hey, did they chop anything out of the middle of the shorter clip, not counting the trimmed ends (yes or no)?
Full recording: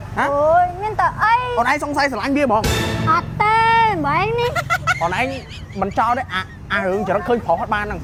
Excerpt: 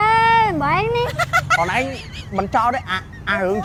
no